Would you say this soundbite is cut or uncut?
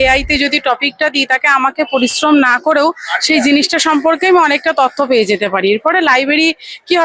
uncut